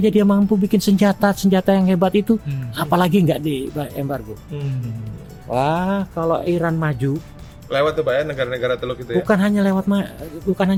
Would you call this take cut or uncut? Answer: uncut